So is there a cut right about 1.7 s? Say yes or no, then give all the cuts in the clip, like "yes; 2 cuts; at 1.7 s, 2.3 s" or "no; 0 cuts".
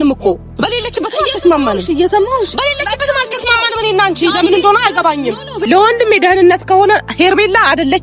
no; 1 cut; at 5.5 s